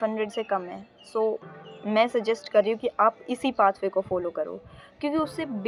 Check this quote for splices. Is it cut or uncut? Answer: uncut